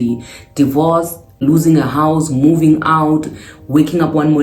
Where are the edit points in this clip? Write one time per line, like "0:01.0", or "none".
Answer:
0:01.4